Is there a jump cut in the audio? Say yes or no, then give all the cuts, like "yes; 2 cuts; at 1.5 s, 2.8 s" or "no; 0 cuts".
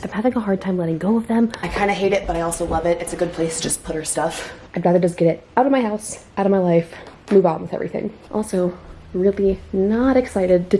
yes; 3 cuts; at 1.6 s, 4.6 s, 8.1 s